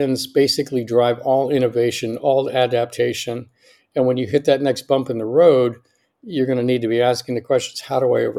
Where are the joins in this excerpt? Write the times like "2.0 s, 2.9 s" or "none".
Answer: none

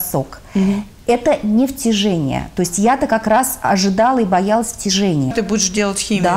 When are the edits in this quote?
5.3 s

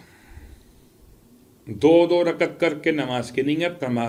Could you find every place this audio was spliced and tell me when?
none

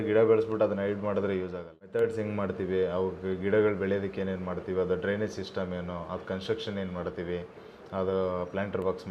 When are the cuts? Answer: 1.8 s

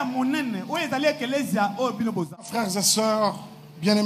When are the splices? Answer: 2.4 s

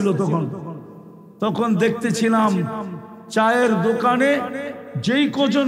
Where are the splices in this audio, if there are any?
none

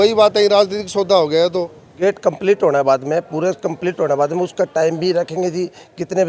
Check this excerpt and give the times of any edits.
1.9 s

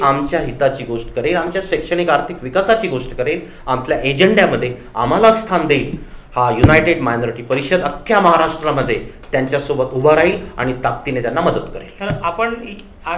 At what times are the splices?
none

